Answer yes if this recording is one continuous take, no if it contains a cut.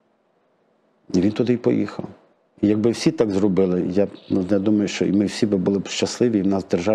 yes